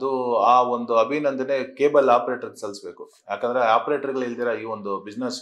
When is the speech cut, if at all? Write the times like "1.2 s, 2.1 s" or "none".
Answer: none

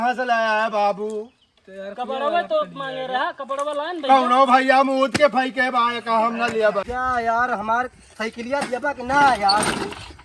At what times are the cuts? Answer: 6.8 s

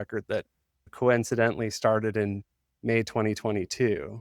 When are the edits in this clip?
0.9 s

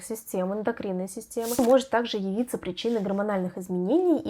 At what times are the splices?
1.6 s

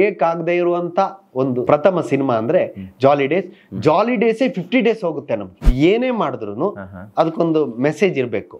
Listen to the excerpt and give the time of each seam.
1.6 s, 5.6 s

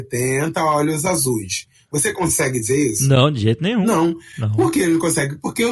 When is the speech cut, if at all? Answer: 3.8 s

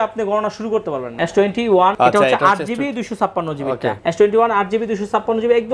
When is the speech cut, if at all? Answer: 1.1 s, 1.9 s, 4.0 s

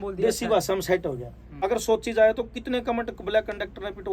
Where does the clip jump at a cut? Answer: 1.5 s

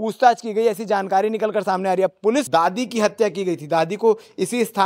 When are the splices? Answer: 2.5 s

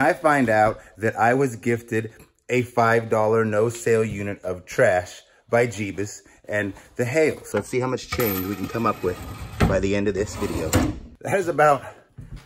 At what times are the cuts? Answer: 7.5 s, 11.1 s

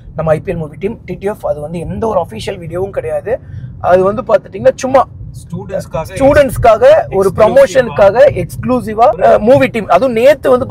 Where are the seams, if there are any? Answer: none

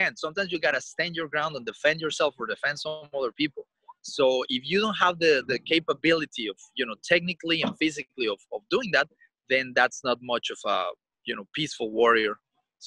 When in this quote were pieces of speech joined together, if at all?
none

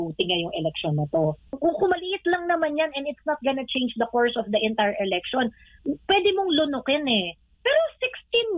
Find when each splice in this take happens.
1.6 s

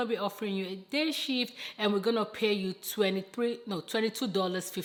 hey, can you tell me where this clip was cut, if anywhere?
none

